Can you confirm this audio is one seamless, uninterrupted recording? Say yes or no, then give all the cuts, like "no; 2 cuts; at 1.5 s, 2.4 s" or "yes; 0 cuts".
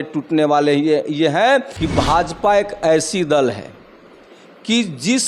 no; 1 cut; at 1.8 s